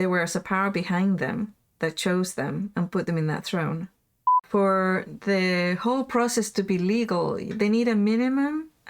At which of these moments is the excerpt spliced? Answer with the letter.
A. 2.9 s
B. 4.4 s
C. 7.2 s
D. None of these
B